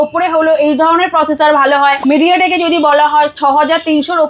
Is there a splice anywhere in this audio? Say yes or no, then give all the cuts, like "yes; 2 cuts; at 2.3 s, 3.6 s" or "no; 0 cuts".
yes; 1 cut; at 2.0 s